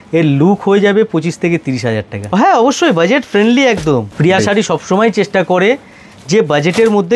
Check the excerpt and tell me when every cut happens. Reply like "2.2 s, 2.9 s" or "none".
2.2 s, 4.1 s